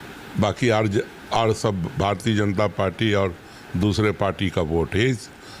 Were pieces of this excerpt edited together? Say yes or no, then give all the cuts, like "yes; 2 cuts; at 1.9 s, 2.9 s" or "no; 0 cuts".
no; 0 cuts